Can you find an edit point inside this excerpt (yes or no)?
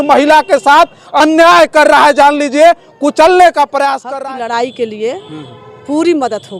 yes